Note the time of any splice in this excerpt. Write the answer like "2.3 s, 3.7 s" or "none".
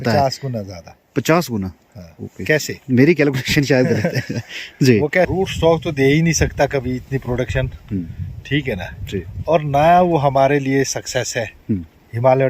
5.3 s